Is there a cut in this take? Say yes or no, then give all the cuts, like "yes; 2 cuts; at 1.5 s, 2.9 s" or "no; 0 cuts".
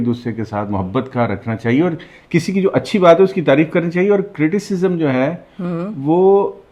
no; 0 cuts